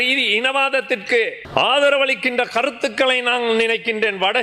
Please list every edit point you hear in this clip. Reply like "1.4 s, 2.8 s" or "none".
1.4 s